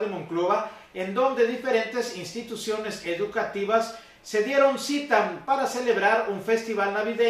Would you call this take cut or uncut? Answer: cut